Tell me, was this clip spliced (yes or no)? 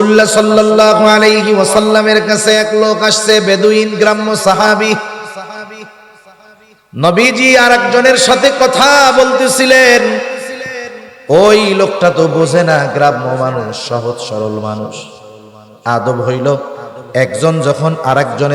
no